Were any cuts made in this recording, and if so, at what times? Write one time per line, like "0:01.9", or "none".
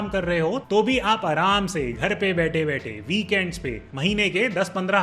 0:03.9